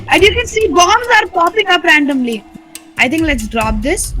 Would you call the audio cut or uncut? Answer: cut